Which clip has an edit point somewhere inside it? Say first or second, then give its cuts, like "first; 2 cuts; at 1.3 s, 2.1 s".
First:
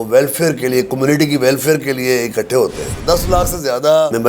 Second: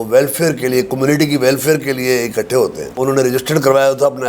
first; 1 cut; at 2.8 s